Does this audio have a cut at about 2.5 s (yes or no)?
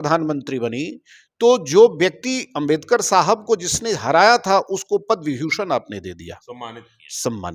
no